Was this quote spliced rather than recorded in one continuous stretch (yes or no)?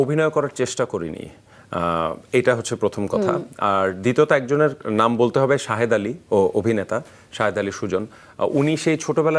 no